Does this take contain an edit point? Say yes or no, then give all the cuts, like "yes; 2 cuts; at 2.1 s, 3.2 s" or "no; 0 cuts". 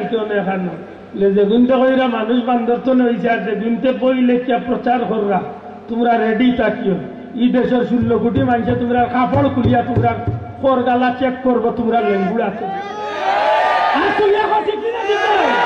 no; 0 cuts